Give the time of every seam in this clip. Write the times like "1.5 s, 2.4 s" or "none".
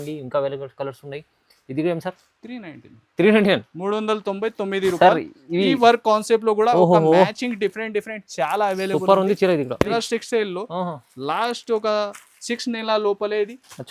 9.9 s

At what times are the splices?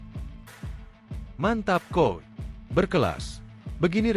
1.3 s

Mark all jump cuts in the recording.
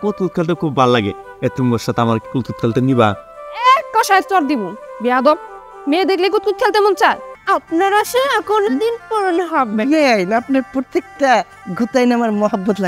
7.3 s

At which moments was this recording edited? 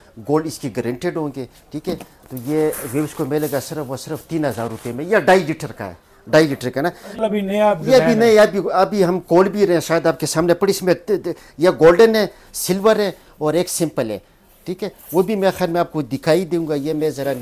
7.2 s

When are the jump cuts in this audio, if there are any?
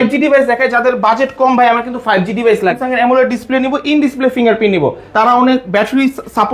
2.8 s, 5.0 s

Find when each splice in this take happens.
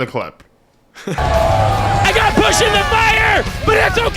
1.2 s

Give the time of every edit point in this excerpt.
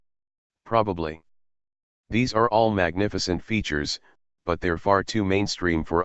none

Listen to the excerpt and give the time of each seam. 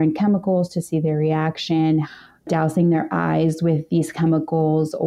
2.5 s

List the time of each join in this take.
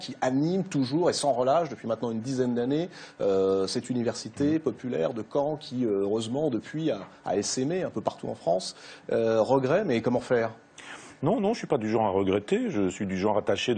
3.9 s

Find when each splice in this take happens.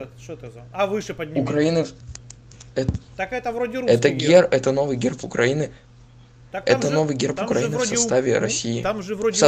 none

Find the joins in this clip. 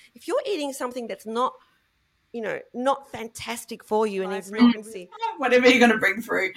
5.3 s

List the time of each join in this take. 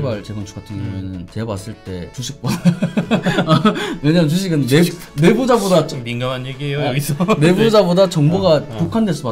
1.3 s, 2.2 s

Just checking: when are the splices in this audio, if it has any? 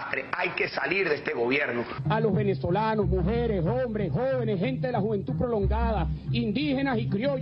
none

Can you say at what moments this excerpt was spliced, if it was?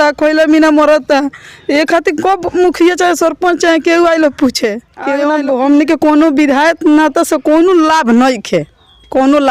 5.2 s

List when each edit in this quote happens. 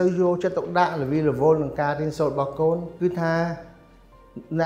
2.9 s

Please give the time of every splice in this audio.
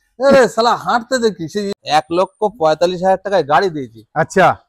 1.8 s

